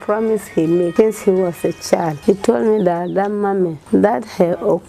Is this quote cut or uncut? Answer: cut